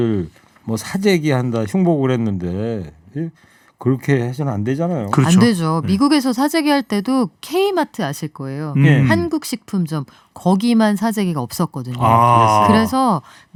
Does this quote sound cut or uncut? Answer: uncut